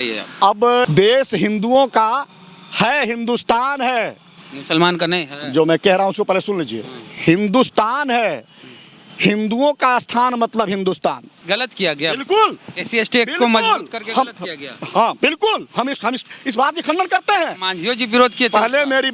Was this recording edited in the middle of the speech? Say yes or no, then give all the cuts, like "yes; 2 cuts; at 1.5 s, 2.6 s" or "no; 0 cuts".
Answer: yes; 2 cuts; at 0.9 s, 11.3 s